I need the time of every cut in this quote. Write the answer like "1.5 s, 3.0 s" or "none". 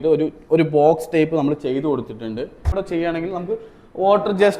2.7 s